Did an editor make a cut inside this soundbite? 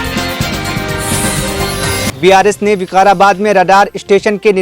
yes; 1 cut; at 2.1 s

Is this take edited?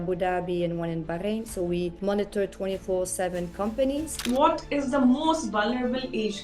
yes; 1 cut; at 4.2 s

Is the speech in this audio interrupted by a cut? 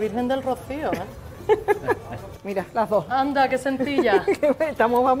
no; 0 cuts

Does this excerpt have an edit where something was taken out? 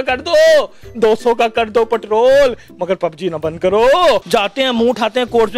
yes; 1 cut; at 4.2 s

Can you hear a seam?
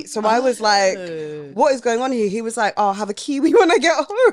no; 0 cuts

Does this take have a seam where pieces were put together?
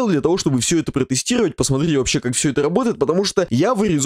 no; 0 cuts

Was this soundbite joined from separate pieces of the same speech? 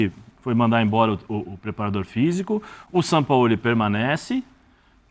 no; 0 cuts

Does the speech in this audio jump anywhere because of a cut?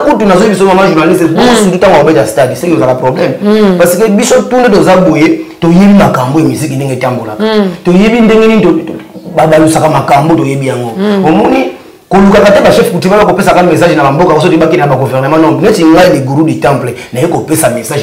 no; 0 cuts

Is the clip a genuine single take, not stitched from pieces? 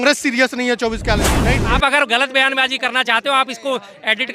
no; 1 cut; at 1.3 s

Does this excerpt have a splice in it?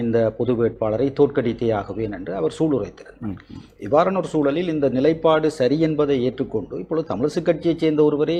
no; 0 cuts

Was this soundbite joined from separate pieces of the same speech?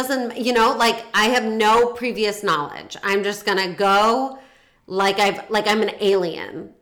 no; 0 cuts

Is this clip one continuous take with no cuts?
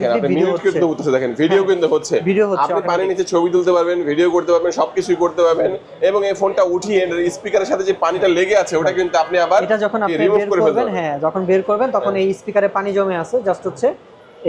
yes; 0 cuts

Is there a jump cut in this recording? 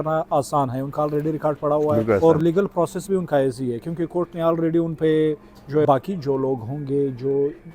yes; 2 cuts; at 2.2 s, 5.8 s

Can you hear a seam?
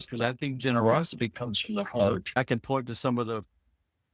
yes; 1 cut; at 2.4 s

